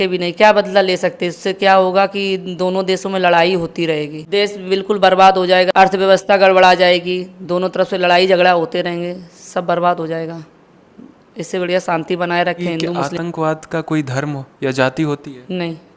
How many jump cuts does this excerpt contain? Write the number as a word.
three